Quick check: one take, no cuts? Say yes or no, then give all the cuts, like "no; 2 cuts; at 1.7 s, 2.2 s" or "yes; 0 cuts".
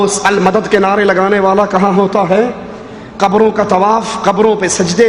yes; 0 cuts